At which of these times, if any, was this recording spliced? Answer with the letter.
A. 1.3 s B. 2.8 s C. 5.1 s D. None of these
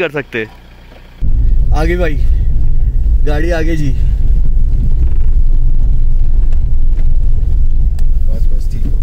A